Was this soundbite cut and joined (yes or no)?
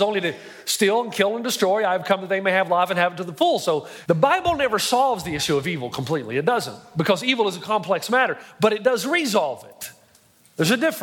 yes